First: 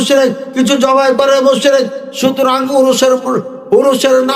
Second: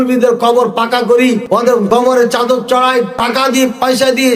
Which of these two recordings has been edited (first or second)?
second